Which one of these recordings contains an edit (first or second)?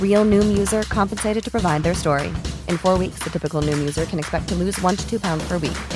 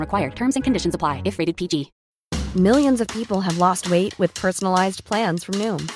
second